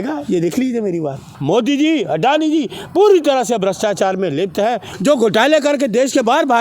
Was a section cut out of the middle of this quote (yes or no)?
yes